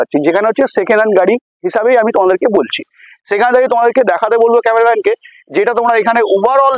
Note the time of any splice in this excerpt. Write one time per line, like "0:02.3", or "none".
none